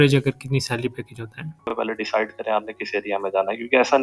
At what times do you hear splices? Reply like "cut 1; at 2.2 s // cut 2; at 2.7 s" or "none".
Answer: cut 1; at 1.7 s